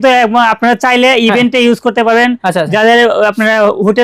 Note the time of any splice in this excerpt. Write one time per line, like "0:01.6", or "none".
none